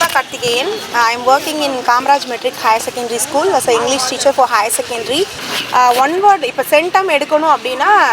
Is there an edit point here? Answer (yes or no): yes